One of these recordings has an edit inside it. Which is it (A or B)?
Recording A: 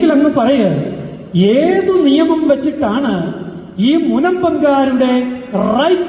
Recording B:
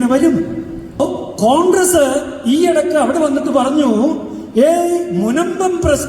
B